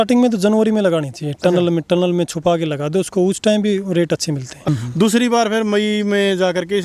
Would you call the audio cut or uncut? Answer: cut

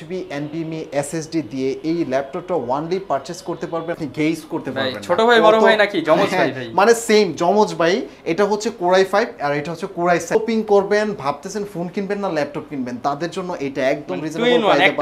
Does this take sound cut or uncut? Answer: cut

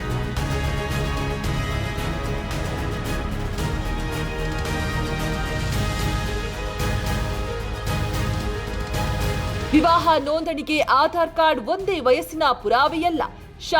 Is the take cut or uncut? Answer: cut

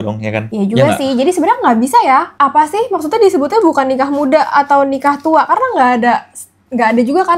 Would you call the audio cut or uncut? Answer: uncut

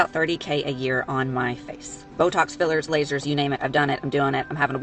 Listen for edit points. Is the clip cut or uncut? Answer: uncut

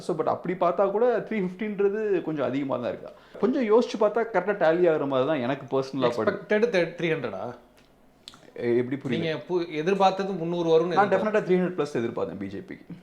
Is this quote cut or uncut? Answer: cut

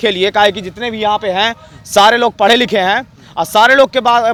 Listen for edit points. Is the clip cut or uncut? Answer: uncut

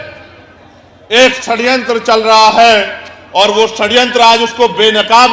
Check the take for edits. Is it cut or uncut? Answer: uncut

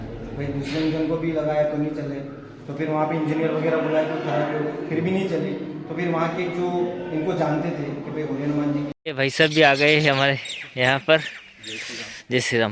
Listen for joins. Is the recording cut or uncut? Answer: cut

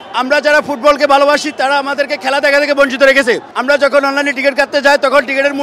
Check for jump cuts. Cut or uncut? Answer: cut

